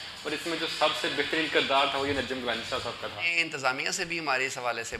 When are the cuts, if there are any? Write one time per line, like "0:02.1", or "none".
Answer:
0:03.4